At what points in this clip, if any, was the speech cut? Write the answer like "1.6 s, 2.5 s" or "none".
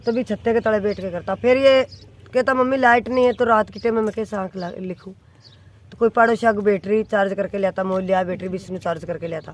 none